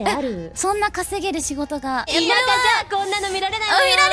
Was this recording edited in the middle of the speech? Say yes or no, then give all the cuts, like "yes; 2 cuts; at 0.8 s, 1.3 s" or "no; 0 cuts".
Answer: yes; 1 cut; at 2.1 s